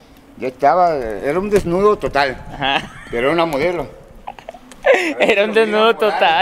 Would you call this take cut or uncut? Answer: uncut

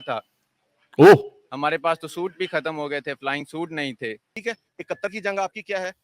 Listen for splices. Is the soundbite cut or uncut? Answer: cut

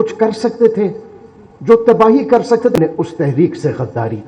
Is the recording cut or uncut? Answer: cut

